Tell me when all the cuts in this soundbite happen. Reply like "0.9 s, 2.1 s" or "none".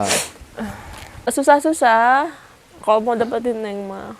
1.3 s